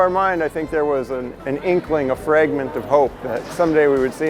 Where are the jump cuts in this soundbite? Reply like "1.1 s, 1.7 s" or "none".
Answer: 1.3 s